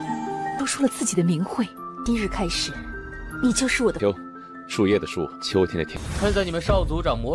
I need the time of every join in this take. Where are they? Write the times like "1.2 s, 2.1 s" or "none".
6.0 s